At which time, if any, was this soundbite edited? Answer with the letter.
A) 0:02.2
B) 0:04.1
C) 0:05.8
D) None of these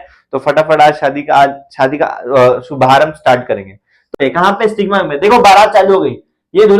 B